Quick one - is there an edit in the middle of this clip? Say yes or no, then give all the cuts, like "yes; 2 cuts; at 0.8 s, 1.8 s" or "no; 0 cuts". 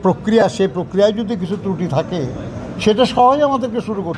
no; 0 cuts